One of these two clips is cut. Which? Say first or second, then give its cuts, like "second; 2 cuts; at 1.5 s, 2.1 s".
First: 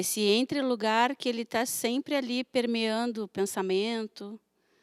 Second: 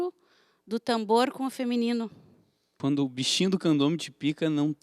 second; 1 cut; at 2.6 s